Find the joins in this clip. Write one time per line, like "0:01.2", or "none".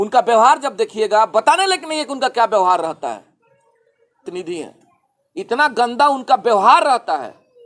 0:04.2